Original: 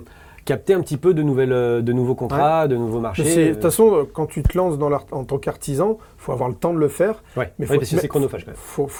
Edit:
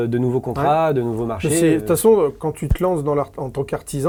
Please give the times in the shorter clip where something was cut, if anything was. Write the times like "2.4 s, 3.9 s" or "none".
none

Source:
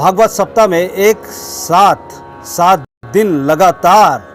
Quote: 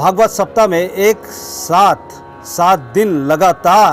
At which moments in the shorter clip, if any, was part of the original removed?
2.9 s

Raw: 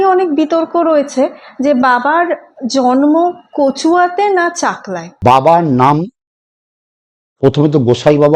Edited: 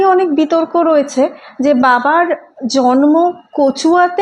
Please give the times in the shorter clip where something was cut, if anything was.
none

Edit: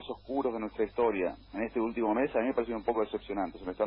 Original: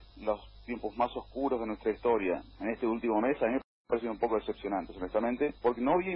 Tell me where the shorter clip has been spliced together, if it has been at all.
2.5 s

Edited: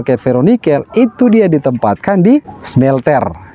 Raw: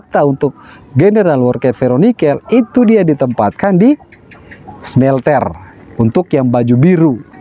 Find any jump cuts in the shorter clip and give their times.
2.6 s

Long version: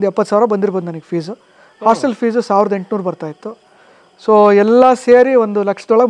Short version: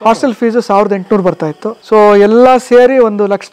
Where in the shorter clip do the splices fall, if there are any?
1.7 s

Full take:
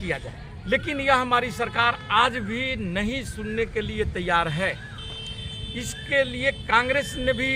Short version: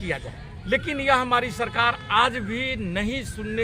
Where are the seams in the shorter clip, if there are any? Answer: none

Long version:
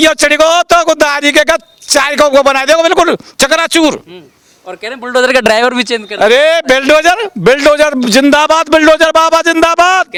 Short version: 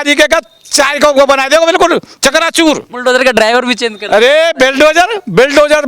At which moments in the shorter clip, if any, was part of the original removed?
2.9 s

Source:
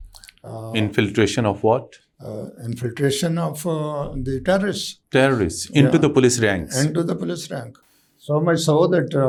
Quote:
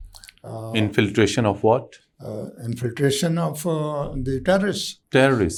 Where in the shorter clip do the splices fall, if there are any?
none

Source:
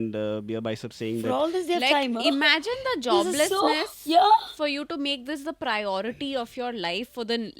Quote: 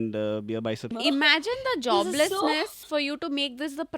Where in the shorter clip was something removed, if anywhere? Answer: 0.9 s, 2.8 s

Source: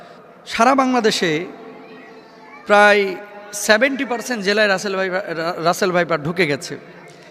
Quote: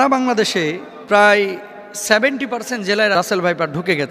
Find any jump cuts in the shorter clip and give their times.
0.9 s, 3.1 s

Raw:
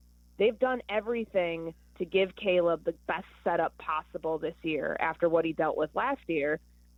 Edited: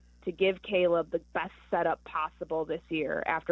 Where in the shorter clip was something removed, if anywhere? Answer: none

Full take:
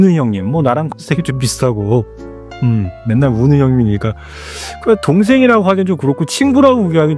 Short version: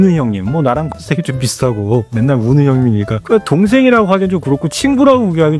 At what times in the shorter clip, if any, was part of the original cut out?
2.1 s, 3.2 s

